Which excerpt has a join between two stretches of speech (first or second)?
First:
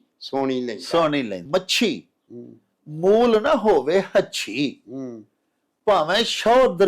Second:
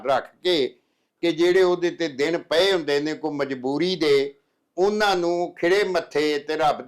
first